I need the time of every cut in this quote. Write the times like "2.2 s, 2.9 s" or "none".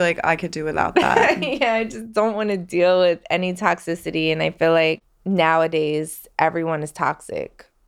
5.1 s